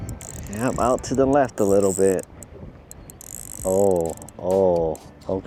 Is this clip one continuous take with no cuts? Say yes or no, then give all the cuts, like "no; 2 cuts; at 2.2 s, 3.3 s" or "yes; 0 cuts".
yes; 0 cuts